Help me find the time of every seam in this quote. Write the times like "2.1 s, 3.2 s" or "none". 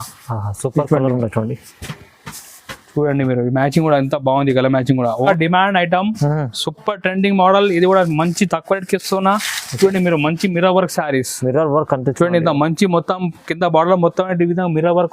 5.2 s